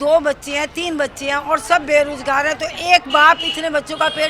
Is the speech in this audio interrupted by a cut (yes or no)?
no